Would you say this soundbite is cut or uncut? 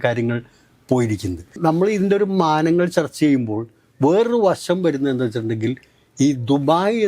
uncut